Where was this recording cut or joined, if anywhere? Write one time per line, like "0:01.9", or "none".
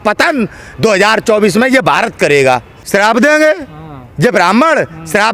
0:02.7